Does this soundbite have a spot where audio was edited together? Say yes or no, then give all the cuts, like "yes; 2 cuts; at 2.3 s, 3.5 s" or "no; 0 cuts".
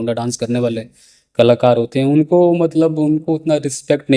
no; 0 cuts